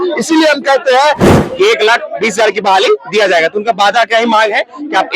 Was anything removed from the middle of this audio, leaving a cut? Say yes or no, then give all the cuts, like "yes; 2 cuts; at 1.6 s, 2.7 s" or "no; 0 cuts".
yes; 1 cut; at 1.3 s